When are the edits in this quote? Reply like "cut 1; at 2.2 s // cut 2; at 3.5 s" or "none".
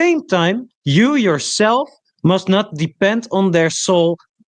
none